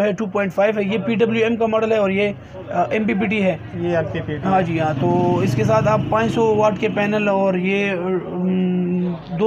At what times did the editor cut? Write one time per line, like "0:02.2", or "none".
none